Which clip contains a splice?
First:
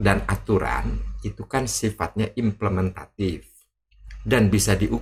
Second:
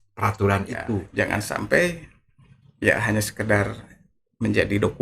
second; 1 cut; at 1.1 s

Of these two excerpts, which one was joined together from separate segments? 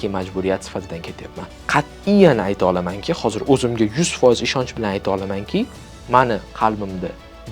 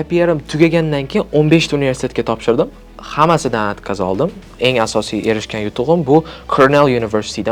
first; 1 cut; at 1.5 s

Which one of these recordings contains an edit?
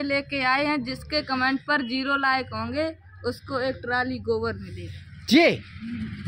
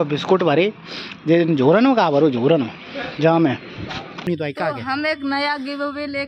second; 1 cut; at 4.1 s

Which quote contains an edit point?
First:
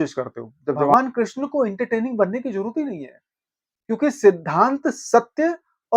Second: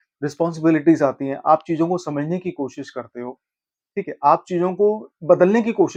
first; 1 cut; at 0.9 s

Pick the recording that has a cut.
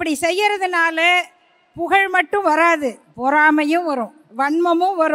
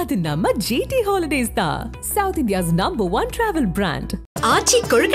first; 2 cuts; at 3.1 s, 4.2 s

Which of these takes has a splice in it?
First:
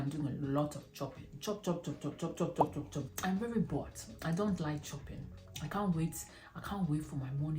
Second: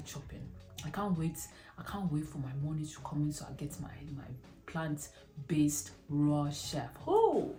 first; 1 cut; at 3.1 s

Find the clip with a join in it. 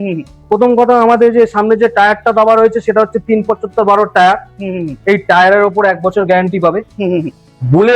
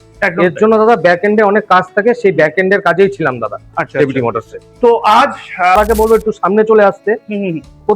second; 1 cut; at 5.8 s

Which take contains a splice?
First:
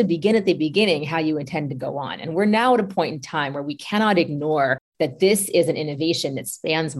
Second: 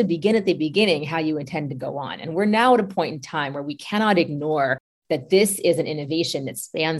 first; 1 cut; at 4.8 s

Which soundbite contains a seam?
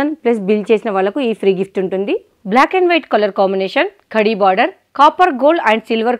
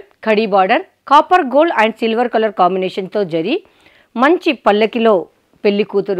first; 1 cut; at 2.3 s

